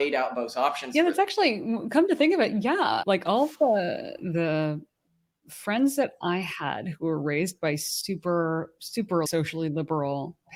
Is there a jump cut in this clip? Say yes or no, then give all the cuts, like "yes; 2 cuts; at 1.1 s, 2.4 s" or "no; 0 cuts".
no; 0 cuts